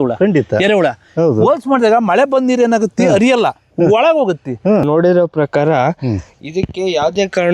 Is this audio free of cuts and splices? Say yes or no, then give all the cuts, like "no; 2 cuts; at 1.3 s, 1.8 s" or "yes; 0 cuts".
no; 1 cut; at 4.9 s